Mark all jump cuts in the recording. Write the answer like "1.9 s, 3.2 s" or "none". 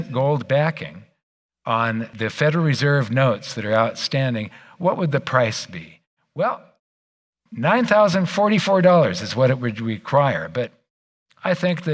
2.1 s